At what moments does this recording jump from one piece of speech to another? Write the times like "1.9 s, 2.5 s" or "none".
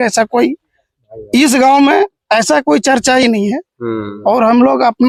none

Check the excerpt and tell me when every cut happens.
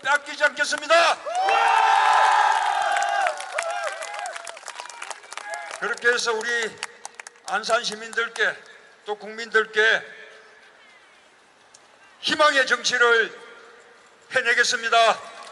2.6 s

